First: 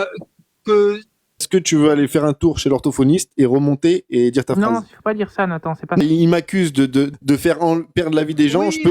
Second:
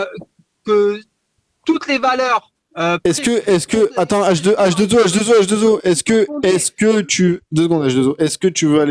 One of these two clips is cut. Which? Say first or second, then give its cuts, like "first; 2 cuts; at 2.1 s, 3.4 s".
first; 3 cuts; at 1.4 s, 6.0 s, 7.1 s